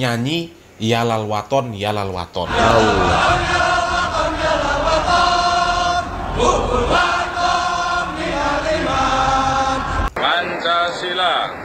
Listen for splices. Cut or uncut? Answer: cut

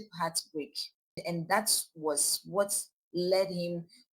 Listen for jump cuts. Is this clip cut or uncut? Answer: cut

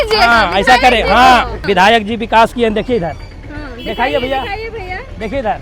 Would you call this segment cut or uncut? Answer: cut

